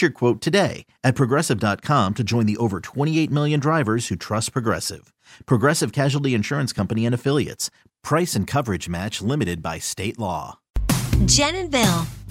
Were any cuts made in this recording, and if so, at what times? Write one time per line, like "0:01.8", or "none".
0:10.7